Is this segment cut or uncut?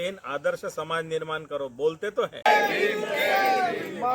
cut